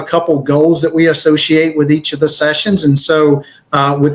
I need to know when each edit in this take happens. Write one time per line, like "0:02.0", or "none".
none